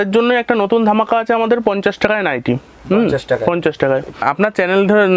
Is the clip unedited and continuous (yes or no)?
no